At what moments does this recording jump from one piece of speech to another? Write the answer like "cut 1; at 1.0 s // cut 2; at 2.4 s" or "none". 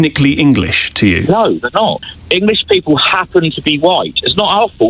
cut 1; at 2.0 s